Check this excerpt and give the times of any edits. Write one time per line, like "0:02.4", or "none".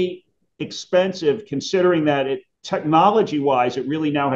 none